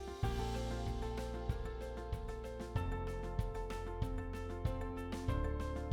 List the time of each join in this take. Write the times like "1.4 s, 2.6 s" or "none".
none